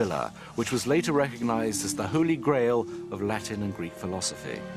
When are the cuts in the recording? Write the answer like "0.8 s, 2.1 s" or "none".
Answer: 2.5 s

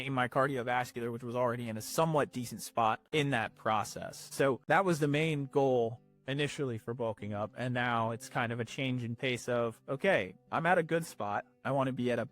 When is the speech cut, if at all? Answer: 3.0 s, 4.6 s

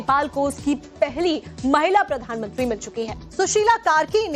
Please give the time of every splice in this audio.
none

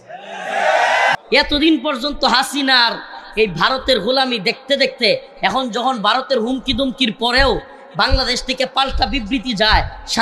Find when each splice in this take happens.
1.1 s

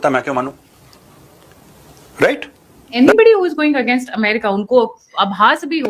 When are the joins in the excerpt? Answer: 2.9 s

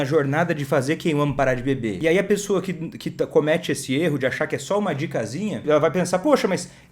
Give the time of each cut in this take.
2.0 s, 5.6 s

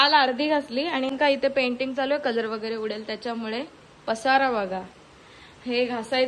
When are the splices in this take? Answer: 1.1 s

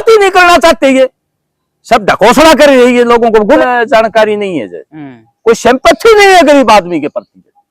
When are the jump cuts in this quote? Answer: 3.4 s

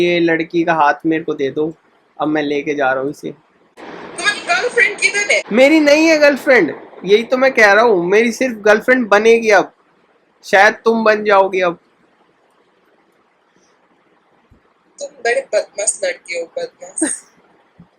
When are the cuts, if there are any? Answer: 5.5 s

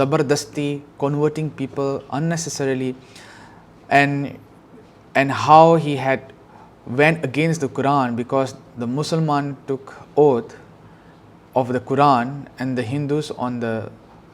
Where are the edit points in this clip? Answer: none

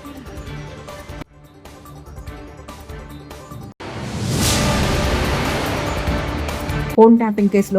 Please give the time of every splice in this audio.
none

